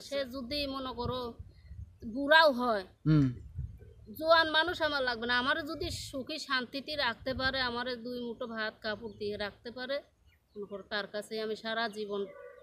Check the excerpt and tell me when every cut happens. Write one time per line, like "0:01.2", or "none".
none